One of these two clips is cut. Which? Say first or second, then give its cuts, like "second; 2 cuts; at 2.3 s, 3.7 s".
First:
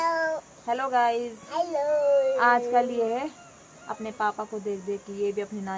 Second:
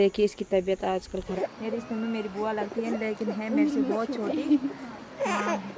second; 1 cut; at 1.3 s